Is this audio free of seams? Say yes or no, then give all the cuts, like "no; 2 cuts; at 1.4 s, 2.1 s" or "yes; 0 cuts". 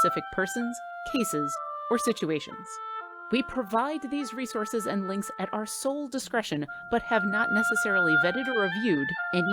yes; 0 cuts